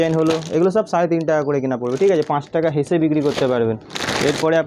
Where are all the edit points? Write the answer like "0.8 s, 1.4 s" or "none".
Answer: none